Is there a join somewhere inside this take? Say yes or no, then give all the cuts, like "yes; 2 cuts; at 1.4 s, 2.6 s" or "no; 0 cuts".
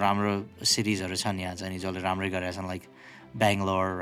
no; 0 cuts